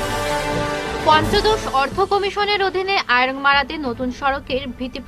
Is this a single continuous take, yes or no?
yes